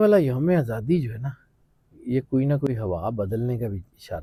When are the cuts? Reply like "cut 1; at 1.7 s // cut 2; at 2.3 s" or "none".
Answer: none